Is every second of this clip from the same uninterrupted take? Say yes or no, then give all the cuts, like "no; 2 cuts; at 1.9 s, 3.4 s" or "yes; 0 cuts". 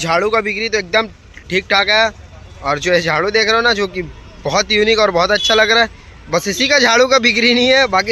yes; 0 cuts